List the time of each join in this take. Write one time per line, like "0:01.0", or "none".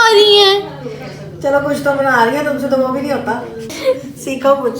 0:03.6